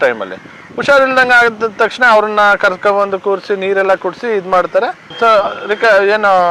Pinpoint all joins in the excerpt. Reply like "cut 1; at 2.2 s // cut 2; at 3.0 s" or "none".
none